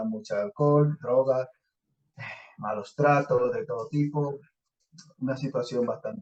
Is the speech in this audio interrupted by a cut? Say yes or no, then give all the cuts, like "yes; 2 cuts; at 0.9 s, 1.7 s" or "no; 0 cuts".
no; 0 cuts